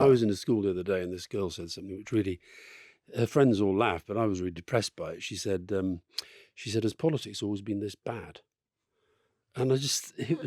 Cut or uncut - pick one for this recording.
uncut